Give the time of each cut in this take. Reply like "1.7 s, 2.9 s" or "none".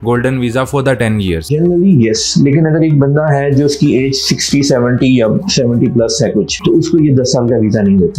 none